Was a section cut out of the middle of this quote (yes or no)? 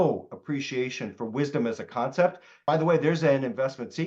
yes